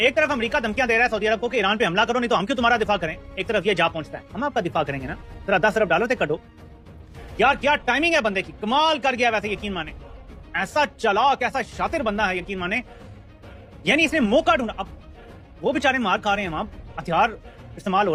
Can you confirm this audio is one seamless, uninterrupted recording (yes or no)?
yes